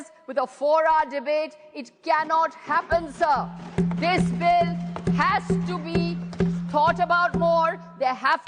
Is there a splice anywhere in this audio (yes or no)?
no